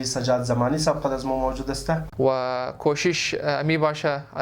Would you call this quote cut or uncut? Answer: cut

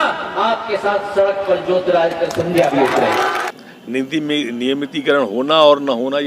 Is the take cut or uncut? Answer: cut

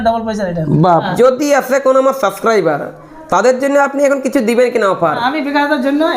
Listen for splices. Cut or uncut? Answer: cut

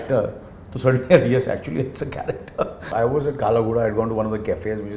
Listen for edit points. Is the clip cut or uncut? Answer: cut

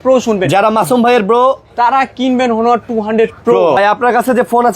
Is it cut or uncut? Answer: cut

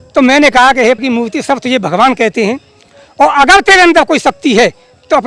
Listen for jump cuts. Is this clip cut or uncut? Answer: uncut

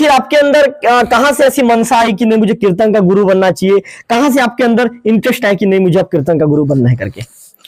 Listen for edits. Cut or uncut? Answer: uncut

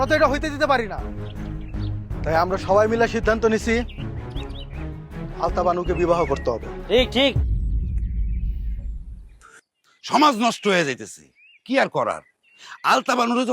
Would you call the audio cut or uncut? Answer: cut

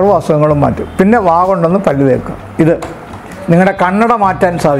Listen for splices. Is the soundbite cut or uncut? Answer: cut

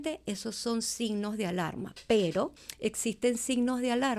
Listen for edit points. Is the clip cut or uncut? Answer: cut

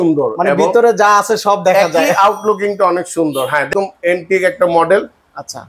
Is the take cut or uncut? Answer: cut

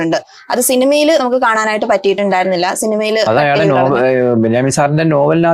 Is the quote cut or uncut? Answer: uncut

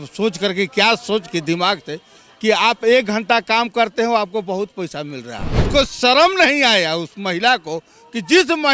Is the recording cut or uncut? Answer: cut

